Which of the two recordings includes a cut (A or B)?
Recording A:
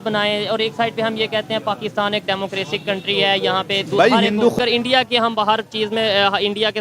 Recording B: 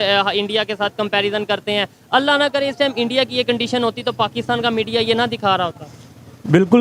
A